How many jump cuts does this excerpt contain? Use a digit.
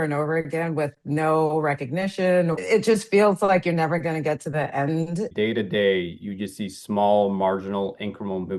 2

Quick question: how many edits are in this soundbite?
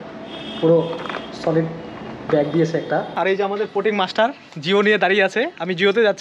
1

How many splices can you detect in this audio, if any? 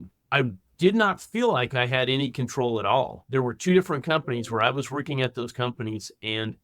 1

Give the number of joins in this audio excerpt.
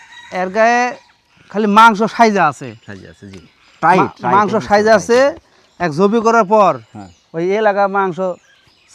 0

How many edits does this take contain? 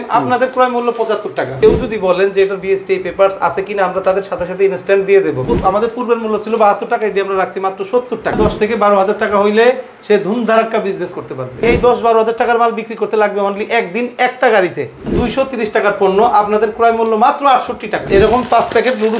6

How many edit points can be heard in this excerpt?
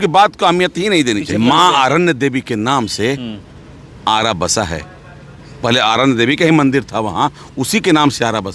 1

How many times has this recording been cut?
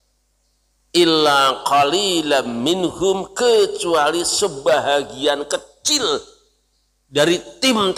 0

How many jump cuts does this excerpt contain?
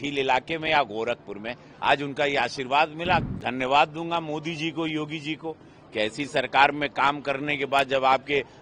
1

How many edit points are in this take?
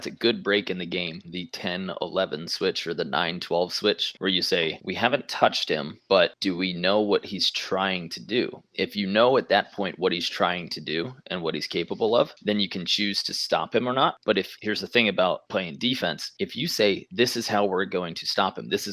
1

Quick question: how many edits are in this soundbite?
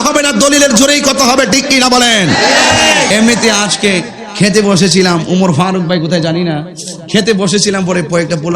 1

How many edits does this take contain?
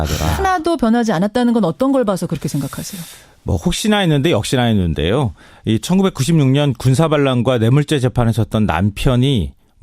1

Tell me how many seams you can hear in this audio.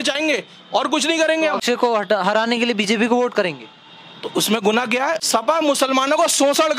2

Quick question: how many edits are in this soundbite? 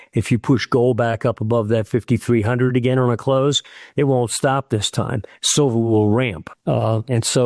0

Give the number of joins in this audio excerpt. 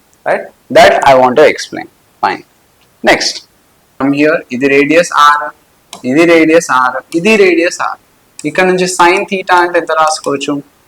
1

